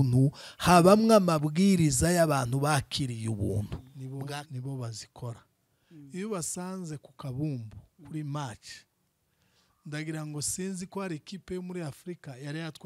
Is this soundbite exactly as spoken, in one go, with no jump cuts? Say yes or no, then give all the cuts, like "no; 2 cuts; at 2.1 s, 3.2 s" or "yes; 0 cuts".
no; 1 cut; at 3.9 s